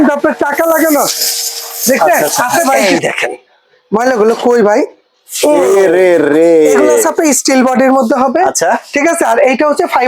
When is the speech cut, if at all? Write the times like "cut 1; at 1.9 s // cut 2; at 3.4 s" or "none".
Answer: cut 1; at 2.8 s // cut 2; at 7.1 s